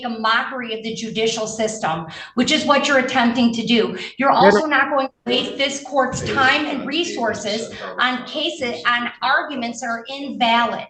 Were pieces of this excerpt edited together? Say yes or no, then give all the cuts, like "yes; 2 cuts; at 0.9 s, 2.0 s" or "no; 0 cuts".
no; 0 cuts